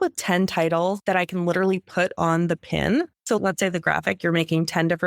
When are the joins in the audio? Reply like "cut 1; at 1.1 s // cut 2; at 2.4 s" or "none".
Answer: cut 1; at 1.0 s // cut 2; at 3.2 s